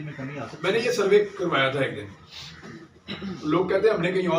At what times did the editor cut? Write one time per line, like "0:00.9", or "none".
none